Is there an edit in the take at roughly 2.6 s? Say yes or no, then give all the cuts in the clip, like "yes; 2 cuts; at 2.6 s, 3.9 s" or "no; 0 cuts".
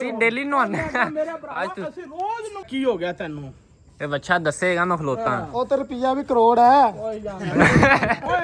yes; 1 cut; at 2.6 s